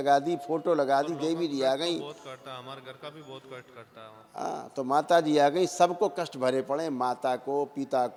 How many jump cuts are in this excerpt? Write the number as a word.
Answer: zero